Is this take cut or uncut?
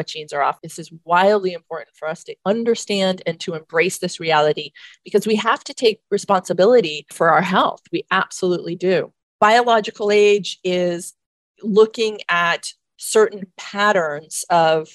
cut